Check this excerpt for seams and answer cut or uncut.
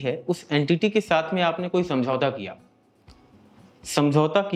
uncut